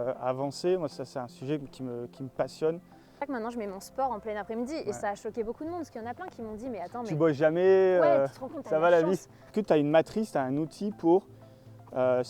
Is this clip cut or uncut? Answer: cut